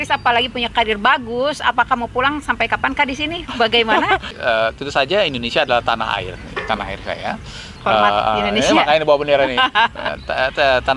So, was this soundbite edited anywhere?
yes; 1 cut; at 4.3 s

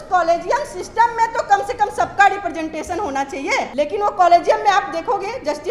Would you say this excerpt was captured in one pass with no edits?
no; 1 cut; at 3.7 s

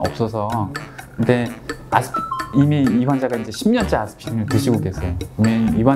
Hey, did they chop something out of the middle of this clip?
no; 0 cuts

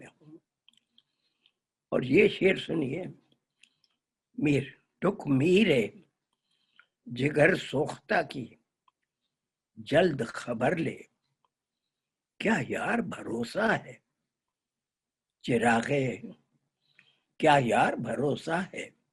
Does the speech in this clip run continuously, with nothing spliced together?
yes; 0 cuts

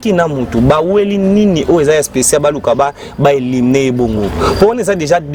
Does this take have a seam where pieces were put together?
no; 0 cuts

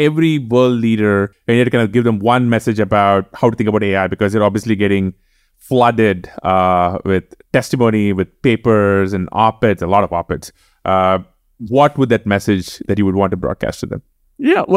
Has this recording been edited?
yes; 1 cut; at 1.3 s

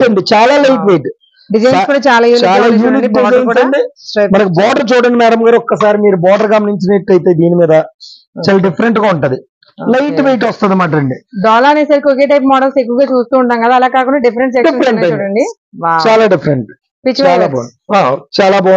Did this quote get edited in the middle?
yes; 1 cut; at 11.3 s

